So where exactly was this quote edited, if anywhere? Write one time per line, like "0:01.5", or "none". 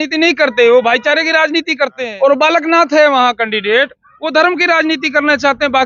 0:02.0